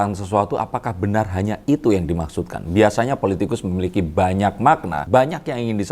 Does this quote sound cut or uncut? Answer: cut